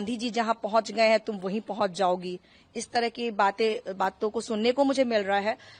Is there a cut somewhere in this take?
no; 0 cuts

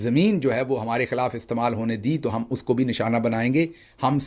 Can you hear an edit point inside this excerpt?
no; 0 cuts

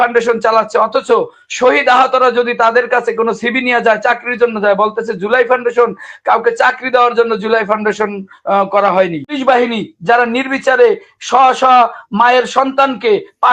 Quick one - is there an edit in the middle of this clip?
yes; 1 cut; at 9.4 s

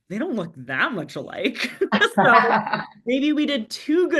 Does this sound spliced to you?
no; 0 cuts

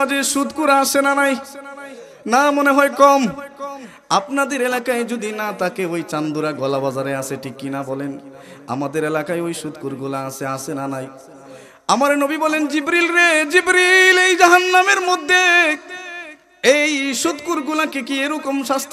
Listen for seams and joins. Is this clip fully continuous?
yes; 0 cuts

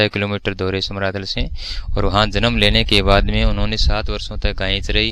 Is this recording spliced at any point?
no; 0 cuts

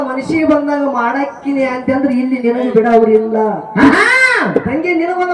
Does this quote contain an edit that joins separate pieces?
no; 0 cuts

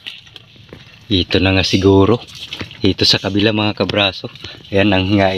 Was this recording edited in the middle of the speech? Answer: no; 0 cuts

